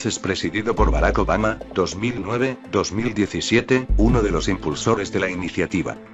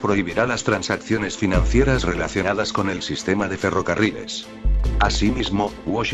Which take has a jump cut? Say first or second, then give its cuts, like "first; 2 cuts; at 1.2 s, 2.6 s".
first; 1 cut; at 3.8 s